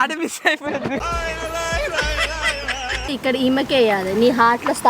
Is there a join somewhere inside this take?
yes; 2 cuts; at 0.9 s, 3.1 s

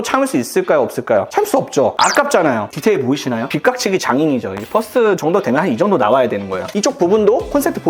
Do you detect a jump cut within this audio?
yes; 2 cuts; at 2.7 s, 6.7 s

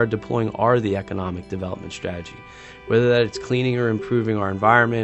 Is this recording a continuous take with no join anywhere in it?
yes; 0 cuts

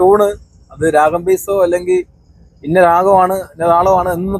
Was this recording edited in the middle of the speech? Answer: no; 0 cuts

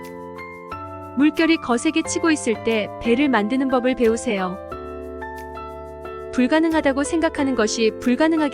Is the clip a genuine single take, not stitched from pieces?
no; 1 cut; at 1.1 s

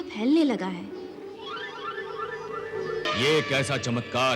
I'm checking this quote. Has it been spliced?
yes; 1 cut; at 3.1 s

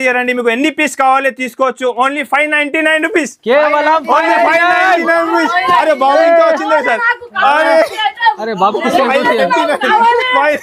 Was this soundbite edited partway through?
no; 0 cuts

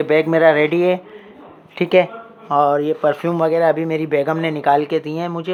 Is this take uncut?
yes; 0 cuts

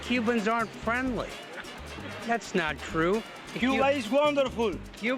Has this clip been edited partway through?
no; 0 cuts

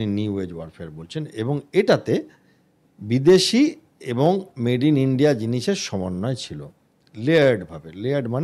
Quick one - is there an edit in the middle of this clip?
no; 0 cuts

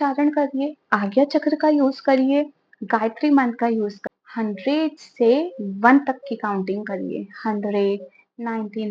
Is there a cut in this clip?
yes; 1 cut; at 4.0 s

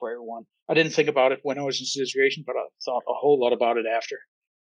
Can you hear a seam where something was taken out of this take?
no; 0 cuts

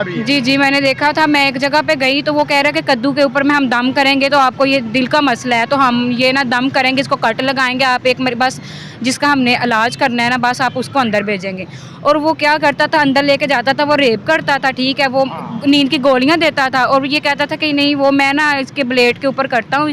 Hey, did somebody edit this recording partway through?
no; 0 cuts

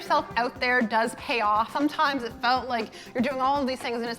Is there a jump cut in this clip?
yes; 1 cut; at 1.7 s

